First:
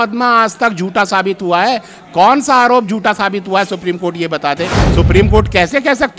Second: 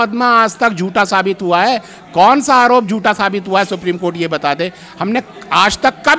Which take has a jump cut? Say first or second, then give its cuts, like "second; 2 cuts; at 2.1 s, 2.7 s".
first; 1 cut; at 4.8 s